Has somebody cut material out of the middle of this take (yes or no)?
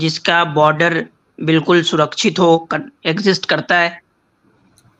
no